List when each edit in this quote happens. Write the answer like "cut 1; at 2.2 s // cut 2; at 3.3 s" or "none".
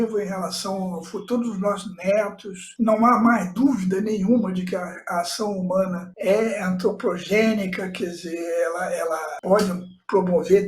cut 1; at 9.3 s

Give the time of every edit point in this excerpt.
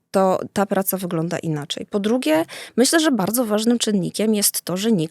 none

